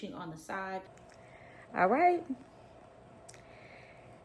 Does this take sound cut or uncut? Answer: cut